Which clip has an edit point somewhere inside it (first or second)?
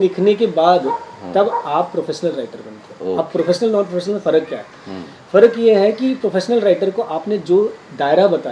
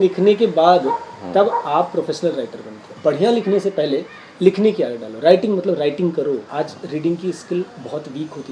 second